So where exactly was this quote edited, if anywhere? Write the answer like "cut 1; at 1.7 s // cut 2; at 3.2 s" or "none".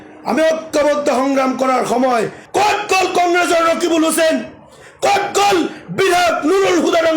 cut 1; at 2.4 s